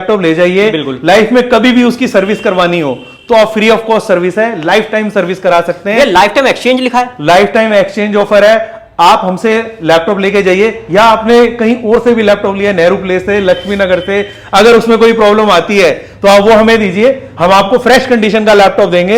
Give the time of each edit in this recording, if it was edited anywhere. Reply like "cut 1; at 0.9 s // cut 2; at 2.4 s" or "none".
none